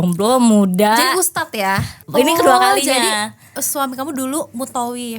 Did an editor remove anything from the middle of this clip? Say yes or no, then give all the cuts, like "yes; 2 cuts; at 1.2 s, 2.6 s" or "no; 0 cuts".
yes; 1 cut; at 1.9 s